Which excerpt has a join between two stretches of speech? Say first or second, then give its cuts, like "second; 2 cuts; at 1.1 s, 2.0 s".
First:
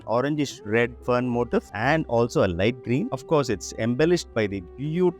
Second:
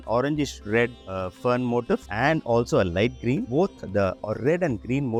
first; 2 cuts; at 1.0 s, 3.1 s